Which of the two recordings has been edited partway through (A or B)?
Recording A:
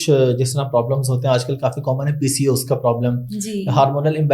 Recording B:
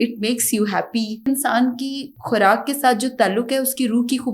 B